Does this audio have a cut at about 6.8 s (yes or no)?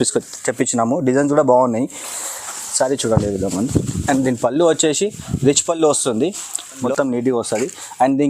yes